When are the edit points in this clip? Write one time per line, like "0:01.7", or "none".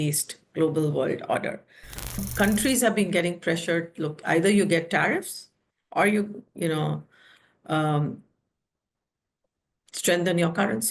0:02.3